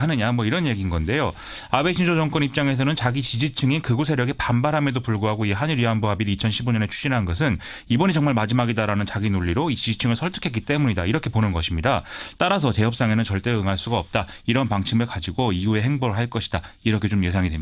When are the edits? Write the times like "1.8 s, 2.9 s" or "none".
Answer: 16.5 s